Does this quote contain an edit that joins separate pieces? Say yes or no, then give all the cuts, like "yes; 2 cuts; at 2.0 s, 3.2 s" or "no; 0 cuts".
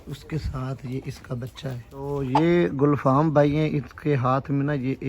yes; 1 cut; at 2.1 s